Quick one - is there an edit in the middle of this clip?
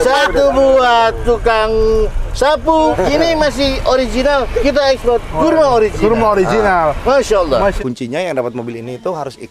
yes; 2 cuts; at 2.9 s, 7.8 s

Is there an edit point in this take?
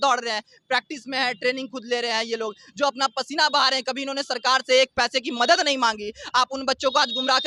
no; 0 cuts

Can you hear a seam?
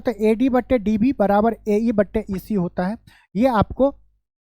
no; 0 cuts

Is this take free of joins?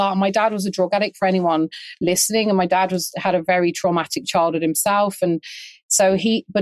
yes; 0 cuts

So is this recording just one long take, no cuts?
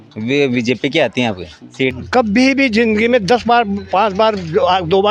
no; 1 cut; at 1.9 s

